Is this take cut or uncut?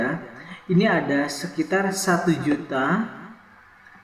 uncut